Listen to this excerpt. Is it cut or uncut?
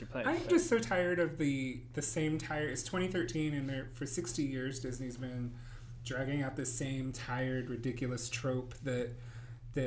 cut